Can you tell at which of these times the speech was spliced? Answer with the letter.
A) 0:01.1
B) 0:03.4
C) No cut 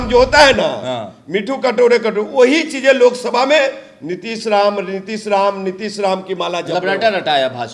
C